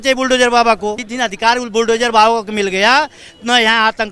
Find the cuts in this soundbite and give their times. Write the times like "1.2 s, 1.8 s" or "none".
1.1 s